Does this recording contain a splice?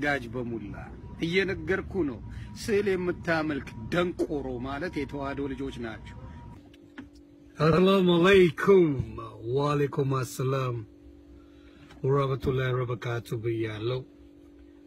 no; 0 cuts

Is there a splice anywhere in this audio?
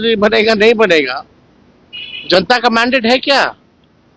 no; 0 cuts

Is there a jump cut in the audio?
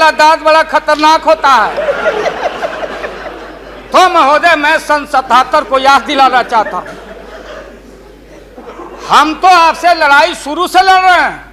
no; 0 cuts

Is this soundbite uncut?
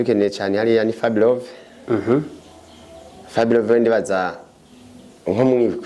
yes; 0 cuts

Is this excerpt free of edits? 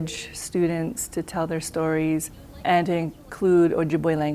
no; 1 cut; at 2.5 s

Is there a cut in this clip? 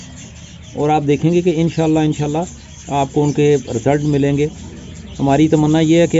no; 0 cuts

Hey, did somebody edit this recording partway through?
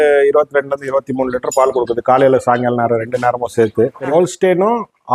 yes; 1 cut; at 4.1 s

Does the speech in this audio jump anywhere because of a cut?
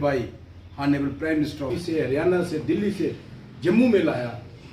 yes; 1 cut; at 1.7 s

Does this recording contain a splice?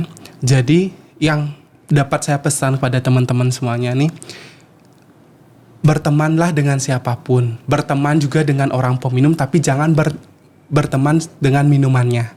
no; 0 cuts

